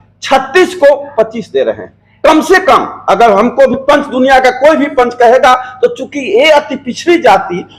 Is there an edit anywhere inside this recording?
no; 0 cuts

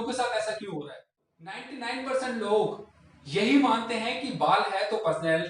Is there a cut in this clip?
yes; 1 cut; at 1.6 s

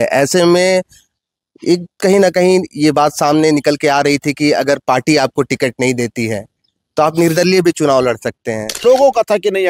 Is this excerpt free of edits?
no; 1 cut; at 8.8 s

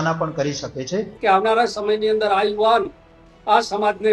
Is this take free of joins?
no; 1 cut; at 1.1 s

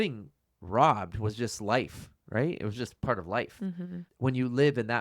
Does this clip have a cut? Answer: yes; 1 cut; at 4.0 s

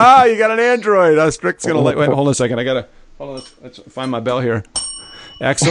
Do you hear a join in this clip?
no; 0 cuts

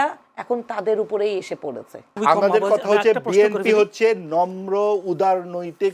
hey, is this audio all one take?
no; 1 cut; at 2.0 s

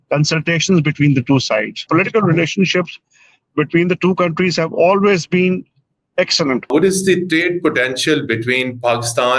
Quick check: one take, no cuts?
no; 2 cuts; at 1.9 s, 6.7 s

